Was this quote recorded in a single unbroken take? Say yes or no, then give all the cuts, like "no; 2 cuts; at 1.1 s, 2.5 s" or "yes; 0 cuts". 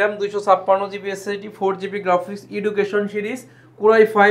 yes; 0 cuts